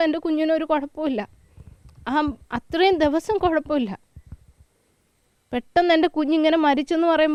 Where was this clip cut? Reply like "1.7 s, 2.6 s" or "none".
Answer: none